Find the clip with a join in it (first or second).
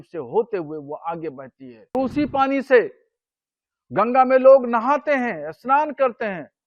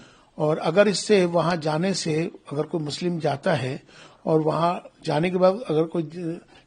first